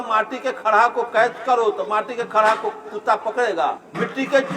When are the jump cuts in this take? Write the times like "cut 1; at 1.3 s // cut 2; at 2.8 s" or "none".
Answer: none